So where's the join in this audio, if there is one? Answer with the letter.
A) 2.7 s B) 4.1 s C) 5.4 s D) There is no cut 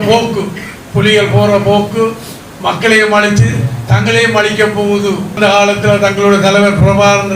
C